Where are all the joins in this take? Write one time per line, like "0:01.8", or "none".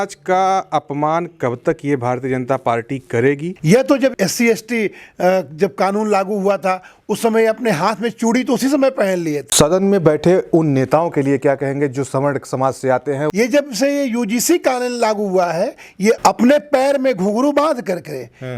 0:03.5
0:09.5
0:13.3